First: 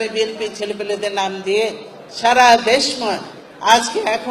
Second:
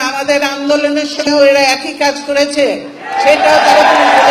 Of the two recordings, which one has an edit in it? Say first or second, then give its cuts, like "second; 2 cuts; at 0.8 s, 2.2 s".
second; 1 cut; at 1.2 s